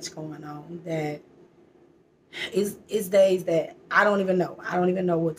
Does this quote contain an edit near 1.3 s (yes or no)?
no